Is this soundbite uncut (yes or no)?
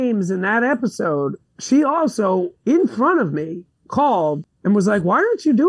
yes